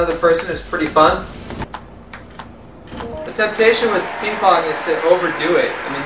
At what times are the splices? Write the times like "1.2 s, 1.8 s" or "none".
1.6 s